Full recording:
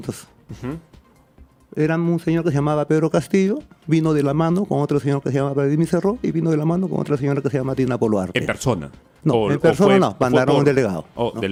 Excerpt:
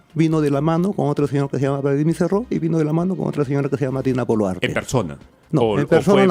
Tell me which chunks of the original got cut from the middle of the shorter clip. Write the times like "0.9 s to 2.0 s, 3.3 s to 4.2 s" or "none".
none